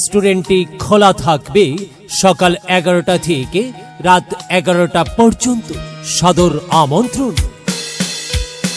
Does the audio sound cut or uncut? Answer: cut